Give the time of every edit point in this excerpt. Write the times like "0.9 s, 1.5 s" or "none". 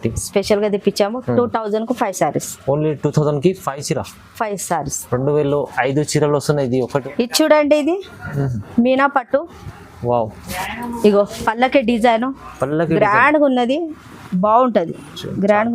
7.0 s